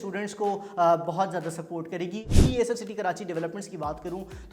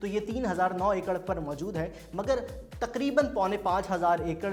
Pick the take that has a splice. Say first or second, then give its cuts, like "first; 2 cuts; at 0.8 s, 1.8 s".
first; 1 cut; at 2.3 s